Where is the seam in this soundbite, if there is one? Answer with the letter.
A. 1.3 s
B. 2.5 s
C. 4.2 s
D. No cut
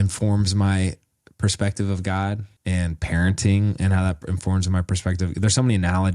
B